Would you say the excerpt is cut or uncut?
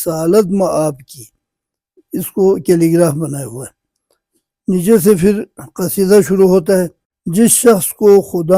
uncut